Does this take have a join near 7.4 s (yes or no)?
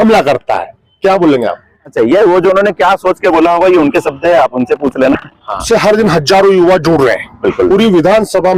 no